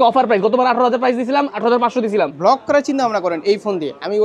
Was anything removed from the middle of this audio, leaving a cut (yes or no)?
yes